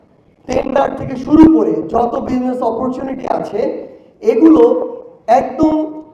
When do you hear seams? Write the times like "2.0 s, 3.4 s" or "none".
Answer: none